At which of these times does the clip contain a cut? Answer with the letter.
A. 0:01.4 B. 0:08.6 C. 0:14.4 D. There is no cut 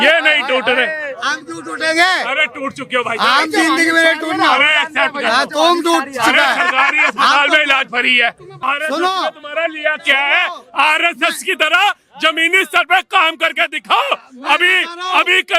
B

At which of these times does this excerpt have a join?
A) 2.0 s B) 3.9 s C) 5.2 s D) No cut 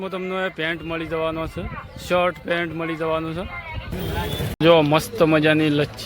B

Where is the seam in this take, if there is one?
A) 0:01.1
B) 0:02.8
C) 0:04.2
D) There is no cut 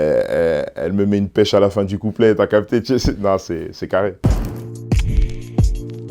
C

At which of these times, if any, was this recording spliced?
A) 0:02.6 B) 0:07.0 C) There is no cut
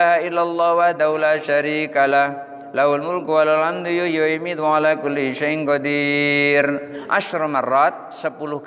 B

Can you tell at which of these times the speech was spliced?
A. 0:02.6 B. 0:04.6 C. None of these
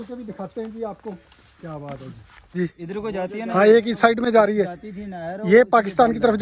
A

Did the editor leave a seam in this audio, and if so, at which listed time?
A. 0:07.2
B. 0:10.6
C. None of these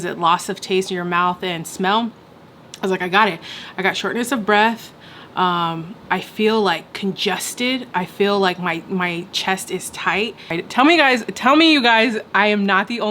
B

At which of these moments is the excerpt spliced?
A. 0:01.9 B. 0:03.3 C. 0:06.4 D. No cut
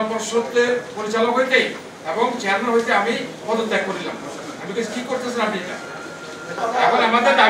C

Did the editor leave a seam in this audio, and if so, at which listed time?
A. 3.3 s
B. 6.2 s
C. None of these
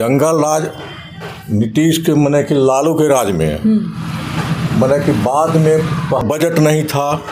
B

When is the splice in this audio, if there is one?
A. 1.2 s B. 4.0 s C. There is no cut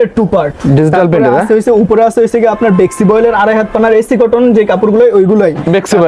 C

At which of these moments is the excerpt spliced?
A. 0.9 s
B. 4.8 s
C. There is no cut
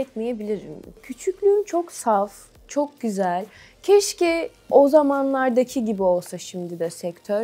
A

